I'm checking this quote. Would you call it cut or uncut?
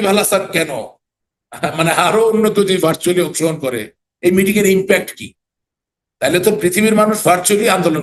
uncut